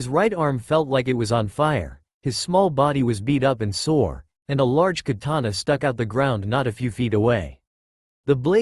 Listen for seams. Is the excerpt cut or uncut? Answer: uncut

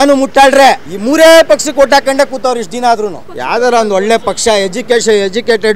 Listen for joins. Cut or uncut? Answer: cut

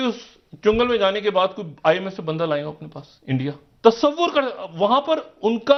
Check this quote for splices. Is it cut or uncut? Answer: uncut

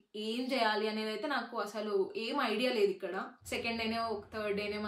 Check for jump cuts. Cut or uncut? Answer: cut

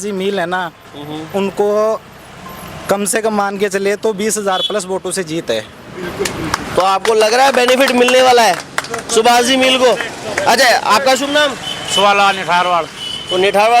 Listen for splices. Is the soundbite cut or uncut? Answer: uncut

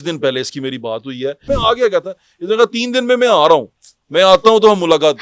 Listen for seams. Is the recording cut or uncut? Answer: cut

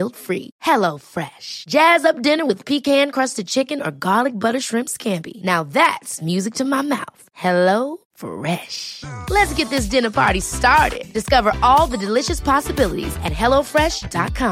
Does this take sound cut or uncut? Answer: uncut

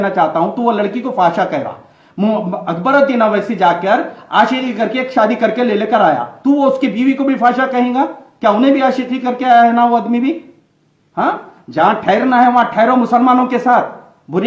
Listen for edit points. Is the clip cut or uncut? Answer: uncut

